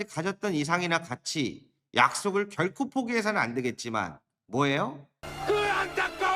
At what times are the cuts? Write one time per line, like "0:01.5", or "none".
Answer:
0:05.3

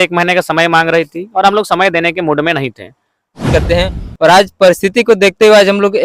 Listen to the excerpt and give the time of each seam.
0:03.5

